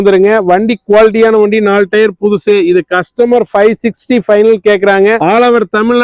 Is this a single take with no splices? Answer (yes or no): yes